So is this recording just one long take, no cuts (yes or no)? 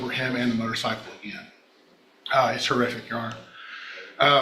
yes